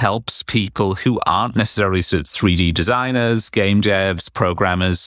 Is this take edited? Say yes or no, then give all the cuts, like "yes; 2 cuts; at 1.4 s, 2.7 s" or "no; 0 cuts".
no; 0 cuts